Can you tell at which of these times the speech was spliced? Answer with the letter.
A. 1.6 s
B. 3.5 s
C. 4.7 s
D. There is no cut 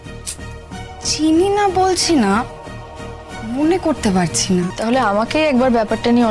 C